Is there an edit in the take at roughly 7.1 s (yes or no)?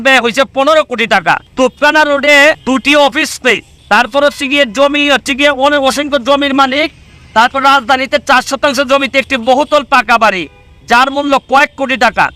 no